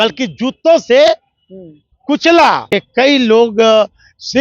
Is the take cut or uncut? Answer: cut